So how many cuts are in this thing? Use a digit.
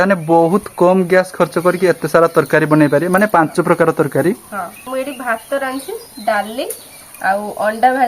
1